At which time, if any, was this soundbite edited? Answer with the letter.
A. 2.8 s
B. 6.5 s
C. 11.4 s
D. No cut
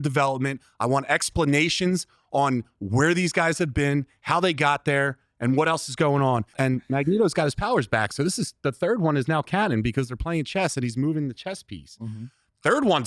B